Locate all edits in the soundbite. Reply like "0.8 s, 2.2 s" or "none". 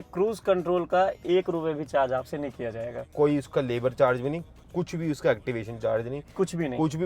3.1 s